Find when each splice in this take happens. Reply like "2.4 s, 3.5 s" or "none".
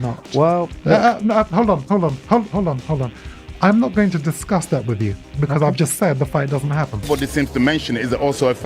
7.1 s